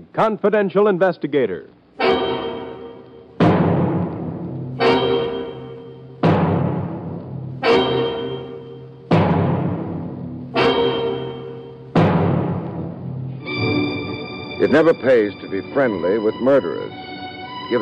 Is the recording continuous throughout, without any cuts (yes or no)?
yes